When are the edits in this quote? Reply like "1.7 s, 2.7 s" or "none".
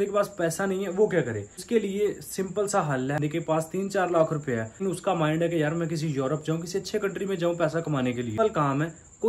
1.5 s, 3.2 s, 4.8 s, 8.4 s